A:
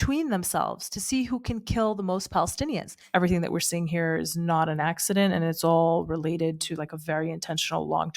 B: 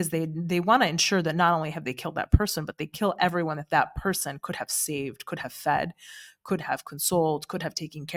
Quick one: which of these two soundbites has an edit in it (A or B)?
A